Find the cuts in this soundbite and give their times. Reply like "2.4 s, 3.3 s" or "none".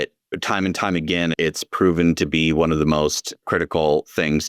3.4 s